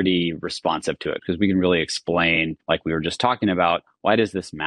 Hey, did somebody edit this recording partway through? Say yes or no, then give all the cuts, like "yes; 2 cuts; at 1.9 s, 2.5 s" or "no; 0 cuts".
yes; 2 cuts; at 1.2 s, 2.5 s